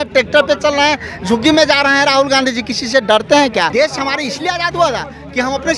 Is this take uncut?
no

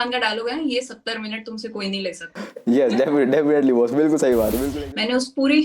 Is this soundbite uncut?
no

